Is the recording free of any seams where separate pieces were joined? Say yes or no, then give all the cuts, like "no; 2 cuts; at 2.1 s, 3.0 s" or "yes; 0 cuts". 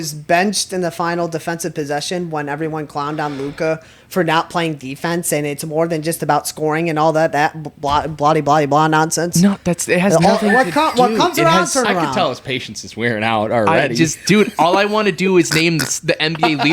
yes; 0 cuts